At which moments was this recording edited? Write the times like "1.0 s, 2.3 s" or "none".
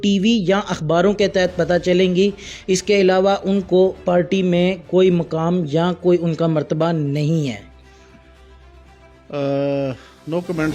none

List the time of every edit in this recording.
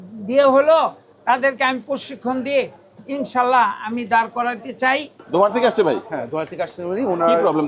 5.2 s

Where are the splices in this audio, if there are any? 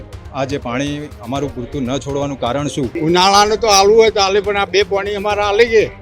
2.9 s

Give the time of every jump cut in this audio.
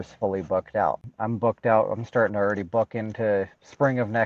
1.1 s

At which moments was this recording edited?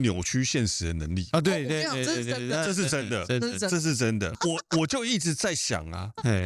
4.3 s

